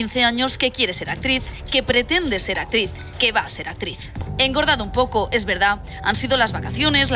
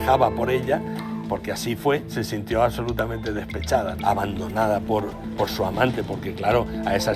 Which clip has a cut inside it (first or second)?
first